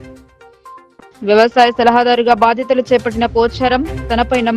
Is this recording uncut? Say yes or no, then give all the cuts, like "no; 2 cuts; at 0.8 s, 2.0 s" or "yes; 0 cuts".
yes; 0 cuts